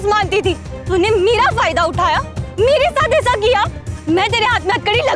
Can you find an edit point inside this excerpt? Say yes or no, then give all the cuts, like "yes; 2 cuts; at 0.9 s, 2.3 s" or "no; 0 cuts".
yes; 1 cut; at 4.0 s